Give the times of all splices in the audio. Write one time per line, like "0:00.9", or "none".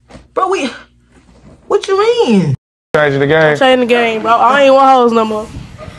0:02.6